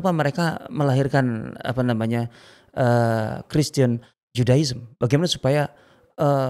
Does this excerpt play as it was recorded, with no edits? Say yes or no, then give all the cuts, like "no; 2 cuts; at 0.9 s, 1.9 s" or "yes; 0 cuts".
yes; 0 cuts